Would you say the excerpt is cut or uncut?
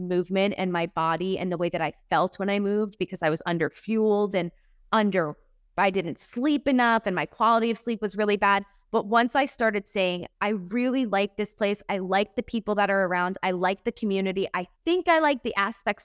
uncut